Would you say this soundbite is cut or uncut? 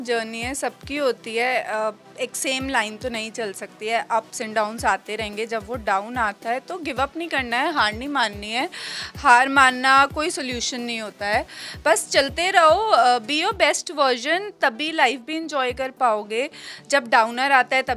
uncut